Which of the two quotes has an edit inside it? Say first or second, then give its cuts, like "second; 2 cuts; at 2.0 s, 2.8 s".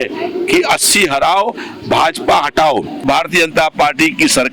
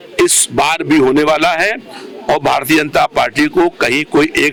first; 1 cut; at 3.0 s